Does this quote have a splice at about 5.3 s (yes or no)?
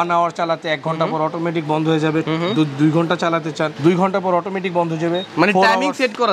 yes